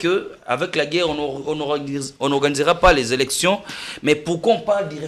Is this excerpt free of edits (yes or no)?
yes